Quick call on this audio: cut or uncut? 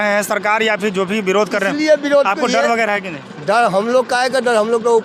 uncut